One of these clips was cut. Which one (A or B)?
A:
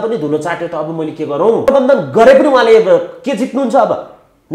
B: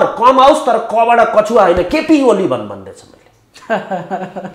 A